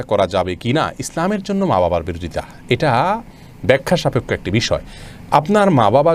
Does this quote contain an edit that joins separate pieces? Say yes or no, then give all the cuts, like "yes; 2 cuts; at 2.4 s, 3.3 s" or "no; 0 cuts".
no; 0 cuts